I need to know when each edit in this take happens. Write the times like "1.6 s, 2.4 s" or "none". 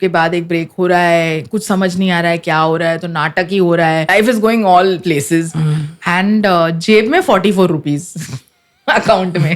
4.1 s